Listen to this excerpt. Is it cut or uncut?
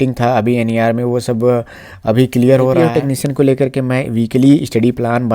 cut